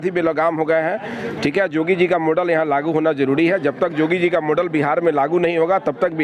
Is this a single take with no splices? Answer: yes; 0 cuts

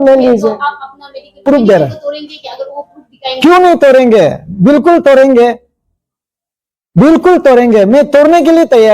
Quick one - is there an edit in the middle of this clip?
yes; 1 cut; at 1.4 s

